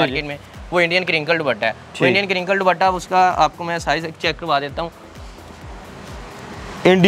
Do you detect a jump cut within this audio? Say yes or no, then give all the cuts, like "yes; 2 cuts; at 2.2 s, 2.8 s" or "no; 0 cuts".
no; 0 cuts